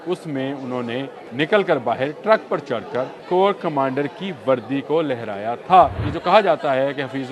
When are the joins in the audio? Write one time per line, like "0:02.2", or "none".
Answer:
0:01.2
0:03.2
0:06.1